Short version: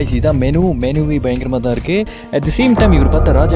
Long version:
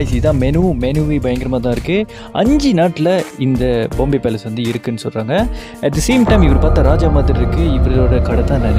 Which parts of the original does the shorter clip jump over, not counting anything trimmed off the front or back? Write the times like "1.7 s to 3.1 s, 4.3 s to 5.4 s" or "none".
2.2 s to 5.7 s